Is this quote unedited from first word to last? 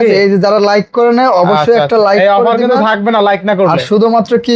yes; 0 cuts

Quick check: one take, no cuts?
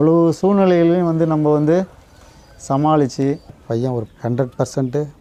yes; 0 cuts

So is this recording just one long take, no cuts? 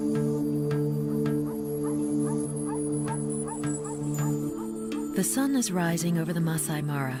yes; 0 cuts

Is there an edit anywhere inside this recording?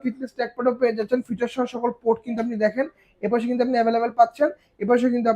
no; 0 cuts

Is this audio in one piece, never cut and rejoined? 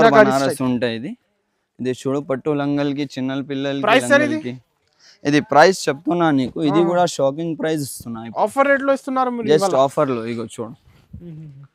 yes; 0 cuts

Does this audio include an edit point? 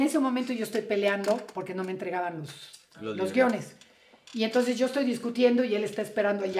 no; 0 cuts

